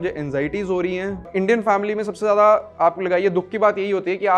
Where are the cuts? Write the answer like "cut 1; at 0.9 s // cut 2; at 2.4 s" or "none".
cut 1; at 1.3 s